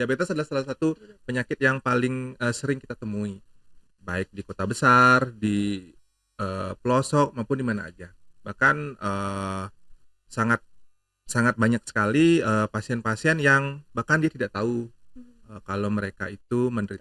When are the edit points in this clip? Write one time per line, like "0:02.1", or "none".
none